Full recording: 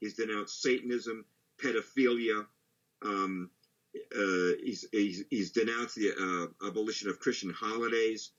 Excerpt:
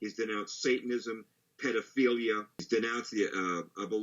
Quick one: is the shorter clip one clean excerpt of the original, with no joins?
no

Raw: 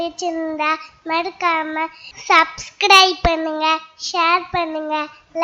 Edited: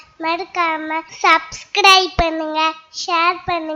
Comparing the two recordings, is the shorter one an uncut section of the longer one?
no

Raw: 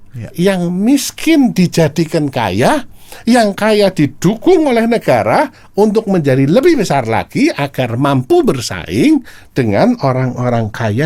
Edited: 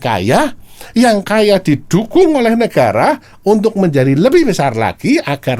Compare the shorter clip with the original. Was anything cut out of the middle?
no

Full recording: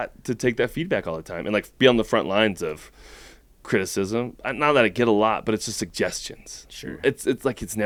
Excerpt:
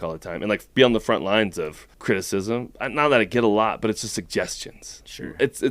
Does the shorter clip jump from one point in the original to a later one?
yes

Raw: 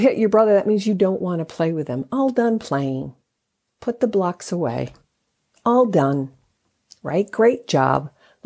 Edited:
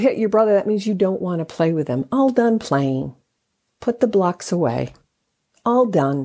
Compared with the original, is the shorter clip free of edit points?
yes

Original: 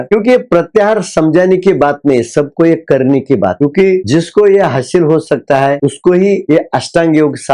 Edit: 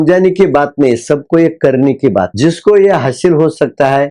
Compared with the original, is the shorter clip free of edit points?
no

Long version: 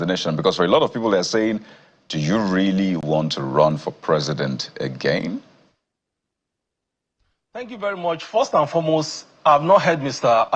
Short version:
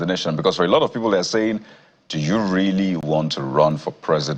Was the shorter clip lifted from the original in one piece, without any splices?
yes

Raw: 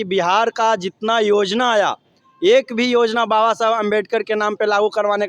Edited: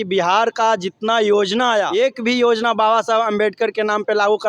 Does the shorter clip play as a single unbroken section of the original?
no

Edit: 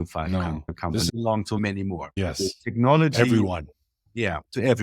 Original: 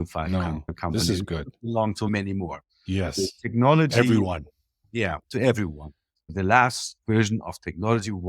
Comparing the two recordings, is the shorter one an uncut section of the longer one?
no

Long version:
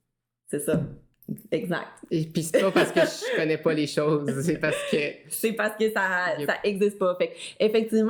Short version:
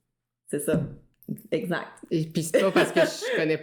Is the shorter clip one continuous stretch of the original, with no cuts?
yes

